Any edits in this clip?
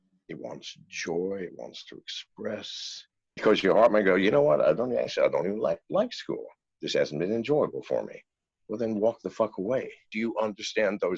yes; 2 cuts; at 3.3 s, 10.1 s

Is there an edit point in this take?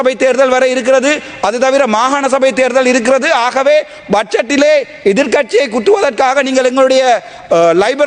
no; 0 cuts

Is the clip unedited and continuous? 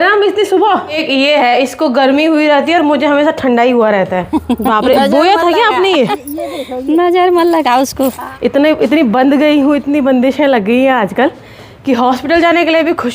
no; 3 cuts; at 1.0 s, 4.3 s, 8.3 s

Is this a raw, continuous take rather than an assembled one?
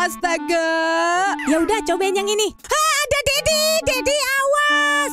no; 1 cut; at 1.4 s

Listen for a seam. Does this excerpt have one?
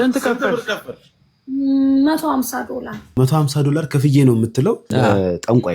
yes; 2 cuts; at 3.0 s, 4.8 s

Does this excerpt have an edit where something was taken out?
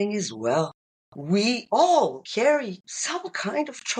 yes; 2 cuts; at 1.3 s, 2.4 s

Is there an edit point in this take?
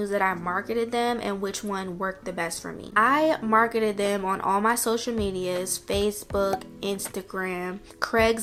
no; 0 cuts

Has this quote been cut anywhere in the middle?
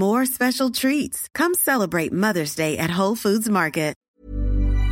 yes; 1 cut; at 4.0 s

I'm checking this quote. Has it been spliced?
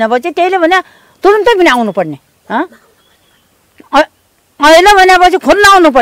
no; 0 cuts

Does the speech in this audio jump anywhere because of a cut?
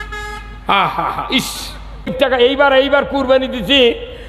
yes; 1 cut; at 2.1 s

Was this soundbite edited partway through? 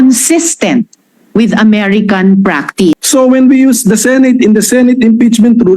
yes; 1 cut; at 2.9 s

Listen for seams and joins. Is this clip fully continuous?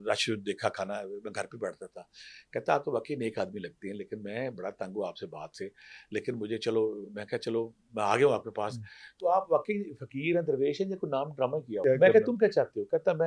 no; 1 cut; at 11.8 s

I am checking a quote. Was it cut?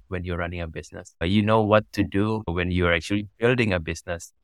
no; 0 cuts

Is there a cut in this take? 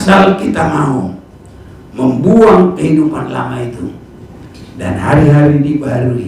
no; 0 cuts

